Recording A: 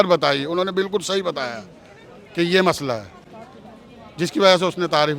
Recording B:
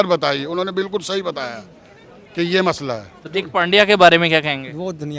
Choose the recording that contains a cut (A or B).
B